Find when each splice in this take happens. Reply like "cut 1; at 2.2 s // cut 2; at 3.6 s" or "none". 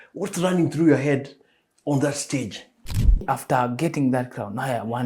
cut 1; at 3.2 s